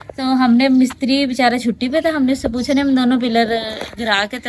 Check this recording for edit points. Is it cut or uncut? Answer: uncut